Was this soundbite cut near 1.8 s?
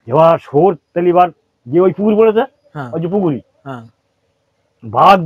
no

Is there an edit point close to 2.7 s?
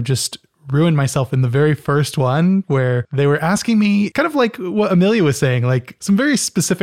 yes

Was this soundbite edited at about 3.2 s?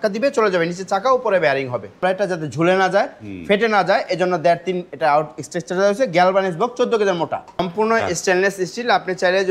no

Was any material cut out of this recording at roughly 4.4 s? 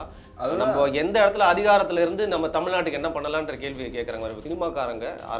yes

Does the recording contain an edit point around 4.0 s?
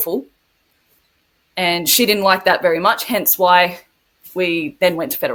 no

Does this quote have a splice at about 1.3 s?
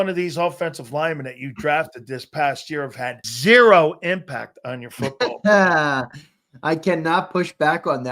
no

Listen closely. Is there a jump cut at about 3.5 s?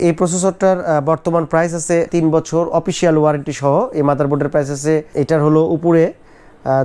no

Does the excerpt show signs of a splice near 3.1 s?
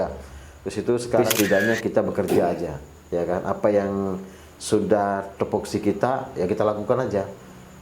no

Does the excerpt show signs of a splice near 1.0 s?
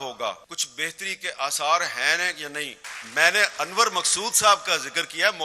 no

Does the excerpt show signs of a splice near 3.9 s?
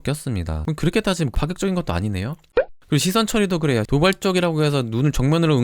yes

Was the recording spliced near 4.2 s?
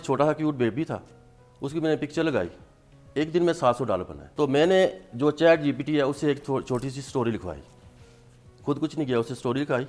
yes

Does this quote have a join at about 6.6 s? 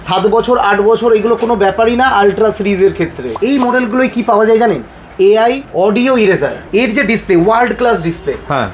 yes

